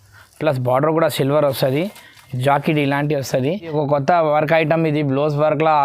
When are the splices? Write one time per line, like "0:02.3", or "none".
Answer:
0:03.7